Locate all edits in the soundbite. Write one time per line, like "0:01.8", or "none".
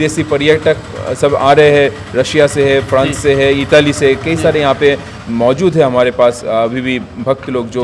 none